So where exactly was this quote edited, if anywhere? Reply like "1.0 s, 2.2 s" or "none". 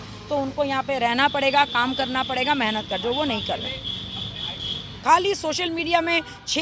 4.9 s